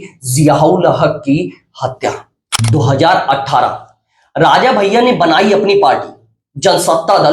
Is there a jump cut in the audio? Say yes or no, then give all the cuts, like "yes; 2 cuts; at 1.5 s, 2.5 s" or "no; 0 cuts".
yes; 1 cut; at 2.5 s